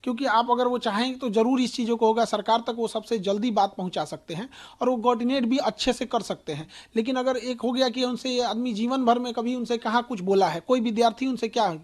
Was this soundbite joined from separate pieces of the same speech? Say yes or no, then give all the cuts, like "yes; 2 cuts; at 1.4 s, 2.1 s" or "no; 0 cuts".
no; 0 cuts